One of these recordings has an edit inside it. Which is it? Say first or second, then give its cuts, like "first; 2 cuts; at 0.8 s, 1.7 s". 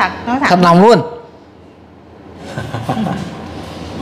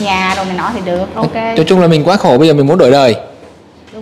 first; 1 cut; at 2.3 s